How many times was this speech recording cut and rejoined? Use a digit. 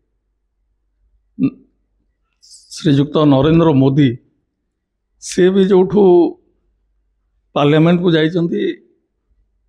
0